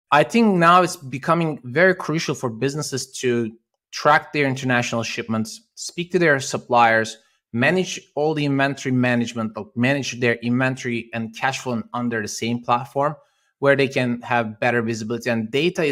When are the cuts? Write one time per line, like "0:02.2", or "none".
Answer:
none